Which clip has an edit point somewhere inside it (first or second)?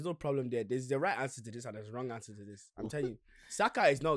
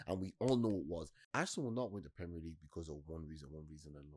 second